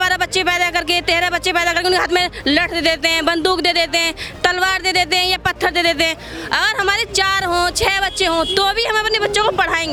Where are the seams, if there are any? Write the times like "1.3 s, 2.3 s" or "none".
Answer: none